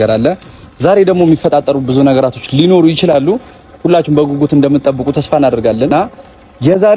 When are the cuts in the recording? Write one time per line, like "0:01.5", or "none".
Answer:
0:05.9

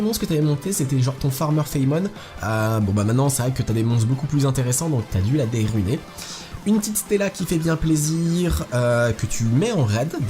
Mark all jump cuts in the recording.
0:09.3

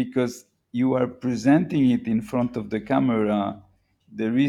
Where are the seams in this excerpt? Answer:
none

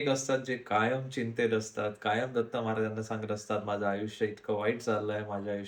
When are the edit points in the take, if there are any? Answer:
none

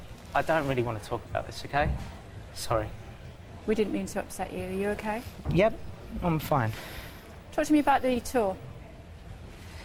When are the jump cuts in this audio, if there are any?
none

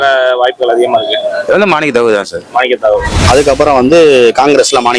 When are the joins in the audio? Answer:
0:03.1

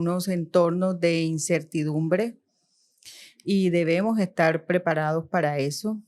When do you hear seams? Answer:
none

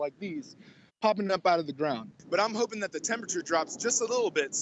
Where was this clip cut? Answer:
0:02.1

